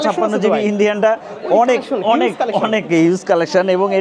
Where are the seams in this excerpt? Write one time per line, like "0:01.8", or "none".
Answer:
none